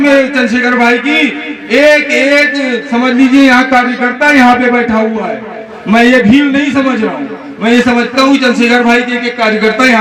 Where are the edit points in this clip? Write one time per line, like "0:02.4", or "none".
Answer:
none